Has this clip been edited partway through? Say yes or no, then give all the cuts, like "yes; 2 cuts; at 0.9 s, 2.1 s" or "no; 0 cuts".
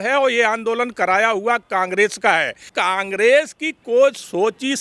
yes; 1 cut; at 2.6 s